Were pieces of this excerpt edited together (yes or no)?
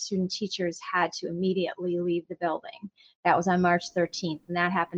no